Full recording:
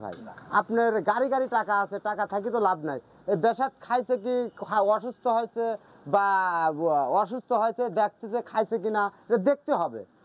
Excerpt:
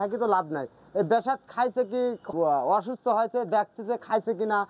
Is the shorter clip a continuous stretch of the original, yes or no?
no